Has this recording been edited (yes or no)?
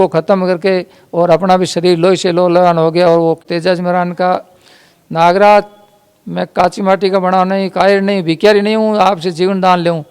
yes